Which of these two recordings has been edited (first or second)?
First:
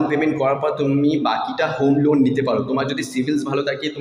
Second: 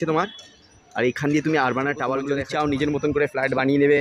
second